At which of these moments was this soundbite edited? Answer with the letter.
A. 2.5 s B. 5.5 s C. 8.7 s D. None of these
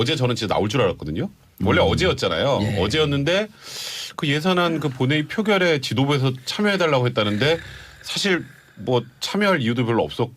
C